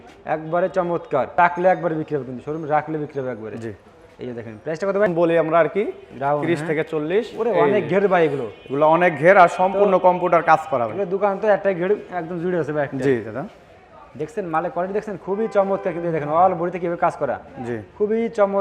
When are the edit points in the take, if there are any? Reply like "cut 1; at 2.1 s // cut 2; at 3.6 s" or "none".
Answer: cut 1; at 1.4 s // cut 2; at 5.1 s